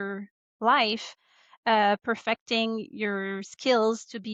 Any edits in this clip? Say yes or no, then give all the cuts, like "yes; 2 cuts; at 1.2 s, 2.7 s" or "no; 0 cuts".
no; 0 cuts